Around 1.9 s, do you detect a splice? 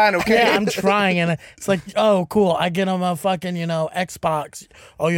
yes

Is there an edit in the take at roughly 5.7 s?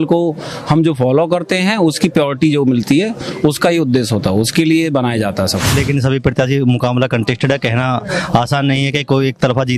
yes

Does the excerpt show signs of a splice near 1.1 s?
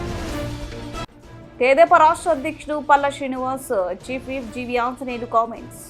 yes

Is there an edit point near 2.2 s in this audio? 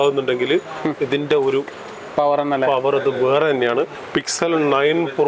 no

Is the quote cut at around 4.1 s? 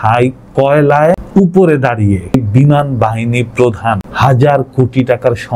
yes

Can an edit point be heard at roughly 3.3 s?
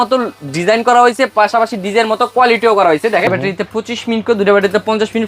yes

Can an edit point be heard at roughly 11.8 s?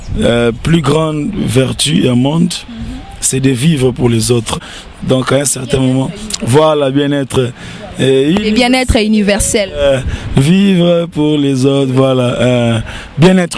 no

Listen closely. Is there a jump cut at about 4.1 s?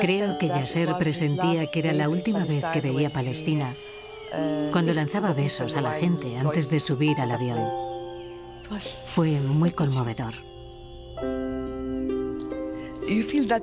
no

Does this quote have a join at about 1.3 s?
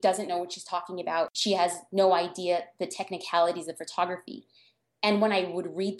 yes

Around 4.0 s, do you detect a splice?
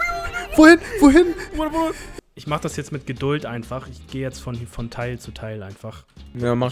no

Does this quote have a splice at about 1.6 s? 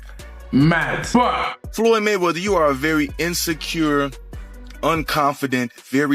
yes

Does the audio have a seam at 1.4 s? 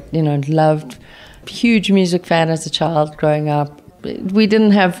yes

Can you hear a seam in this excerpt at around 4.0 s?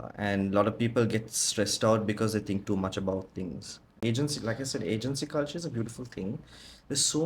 yes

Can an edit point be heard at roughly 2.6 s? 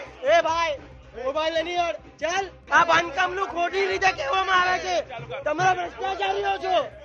yes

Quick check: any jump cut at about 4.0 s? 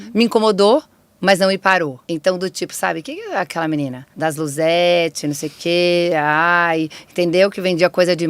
yes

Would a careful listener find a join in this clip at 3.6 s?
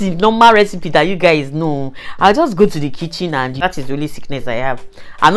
yes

